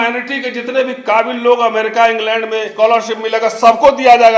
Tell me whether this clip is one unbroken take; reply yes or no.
no